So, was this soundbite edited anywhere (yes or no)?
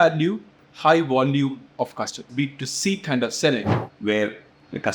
yes